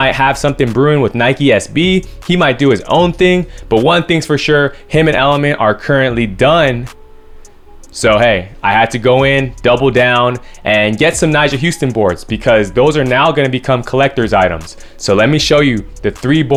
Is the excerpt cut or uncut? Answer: uncut